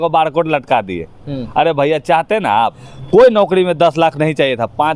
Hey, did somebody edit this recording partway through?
yes; 1 cut; at 2.9 s

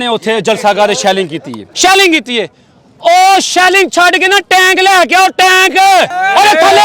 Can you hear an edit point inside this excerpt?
yes; 1 cut; at 1.6 s

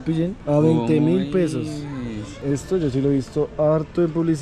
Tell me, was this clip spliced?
yes; 1 cut; at 2.4 s

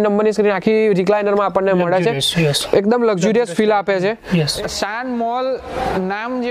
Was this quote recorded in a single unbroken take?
no; 1 cut; at 4.7 s

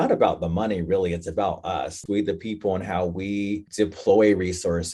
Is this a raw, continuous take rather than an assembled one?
no; 2 cuts; at 2.0 s, 3.7 s

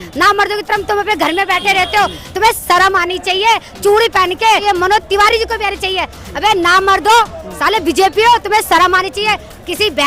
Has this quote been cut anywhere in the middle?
yes; 2 cuts; at 4.6 s, 7.4 s

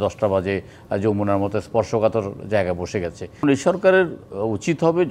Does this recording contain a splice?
yes; 1 cut; at 3.4 s

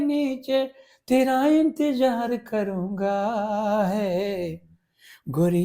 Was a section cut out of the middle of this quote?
no; 0 cuts

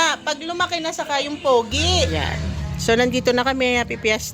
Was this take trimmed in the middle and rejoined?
yes; 1 cut; at 2.1 s

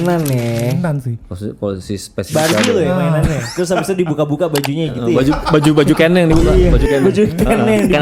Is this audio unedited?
yes; 0 cuts

